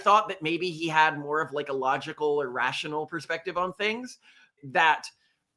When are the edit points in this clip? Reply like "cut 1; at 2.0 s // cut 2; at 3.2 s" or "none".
cut 1; at 4.5 s